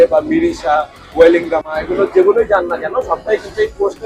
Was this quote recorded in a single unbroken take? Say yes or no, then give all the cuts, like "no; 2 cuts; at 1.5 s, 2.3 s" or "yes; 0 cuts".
yes; 0 cuts